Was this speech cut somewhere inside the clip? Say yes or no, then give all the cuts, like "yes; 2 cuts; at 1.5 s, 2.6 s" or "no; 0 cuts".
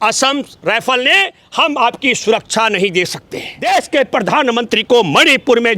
yes; 1 cut; at 3.5 s